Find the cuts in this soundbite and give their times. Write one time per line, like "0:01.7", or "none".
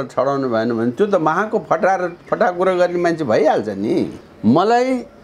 0:04.2